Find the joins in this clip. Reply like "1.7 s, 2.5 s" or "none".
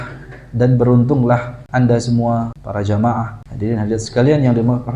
1.6 s, 2.6 s, 3.4 s